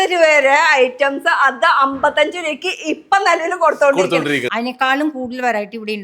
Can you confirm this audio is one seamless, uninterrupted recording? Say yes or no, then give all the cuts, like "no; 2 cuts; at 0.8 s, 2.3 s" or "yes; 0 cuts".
no; 1 cut; at 4.5 s